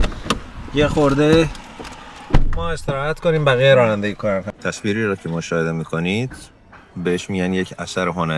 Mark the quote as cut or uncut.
cut